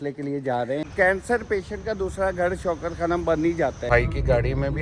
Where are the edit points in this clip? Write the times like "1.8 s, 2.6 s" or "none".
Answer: 0.8 s, 3.9 s